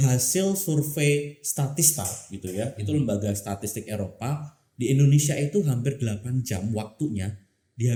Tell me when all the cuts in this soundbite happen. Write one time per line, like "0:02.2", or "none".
none